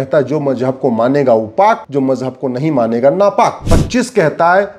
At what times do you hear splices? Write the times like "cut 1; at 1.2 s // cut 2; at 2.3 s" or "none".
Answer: cut 1; at 1.8 s // cut 2; at 3.7 s